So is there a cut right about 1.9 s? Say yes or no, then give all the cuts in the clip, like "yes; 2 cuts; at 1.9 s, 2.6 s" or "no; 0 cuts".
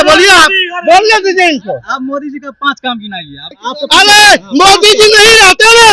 no; 1 cut; at 3.5 s